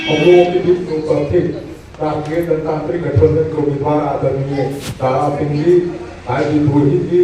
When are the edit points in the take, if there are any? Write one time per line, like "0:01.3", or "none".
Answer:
0:04.8